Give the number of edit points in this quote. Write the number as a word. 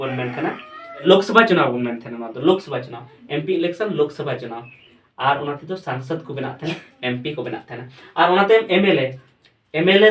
one